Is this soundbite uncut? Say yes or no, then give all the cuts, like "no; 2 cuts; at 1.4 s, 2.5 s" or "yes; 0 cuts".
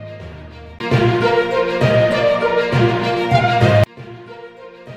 yes; 0 cuts